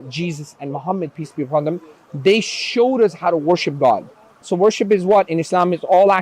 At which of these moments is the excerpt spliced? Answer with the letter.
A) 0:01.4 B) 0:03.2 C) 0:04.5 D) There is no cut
C